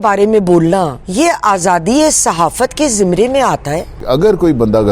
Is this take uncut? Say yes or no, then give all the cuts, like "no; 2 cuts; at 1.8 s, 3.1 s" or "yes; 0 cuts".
no; 2 cuts; at 1.0 s, 4.0 s